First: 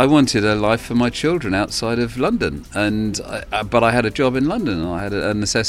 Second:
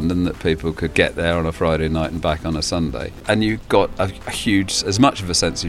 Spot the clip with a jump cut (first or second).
second